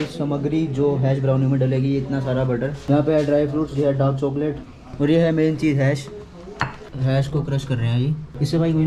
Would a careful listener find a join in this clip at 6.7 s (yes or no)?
yes